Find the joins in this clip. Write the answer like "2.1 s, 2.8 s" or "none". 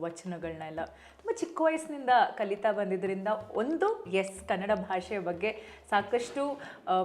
none